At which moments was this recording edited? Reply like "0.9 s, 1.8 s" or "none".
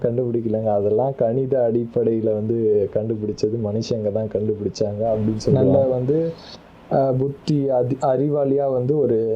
5.5 s